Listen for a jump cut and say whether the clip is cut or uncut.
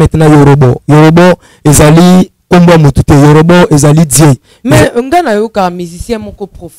uncut